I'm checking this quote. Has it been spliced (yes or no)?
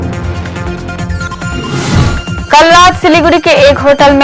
yes